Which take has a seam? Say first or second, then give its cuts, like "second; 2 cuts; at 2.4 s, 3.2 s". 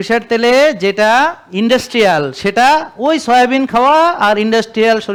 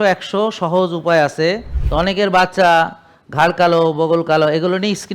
second; 1 cut; at 1.7 s